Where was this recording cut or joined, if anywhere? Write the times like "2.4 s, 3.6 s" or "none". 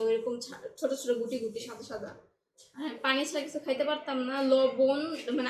none

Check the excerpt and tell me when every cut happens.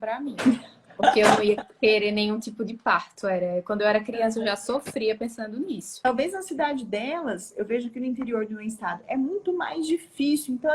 5.9 s

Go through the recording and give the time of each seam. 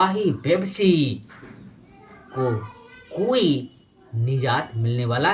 none

